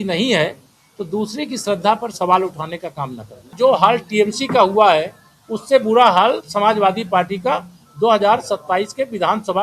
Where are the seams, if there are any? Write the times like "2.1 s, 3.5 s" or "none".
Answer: 3.5 s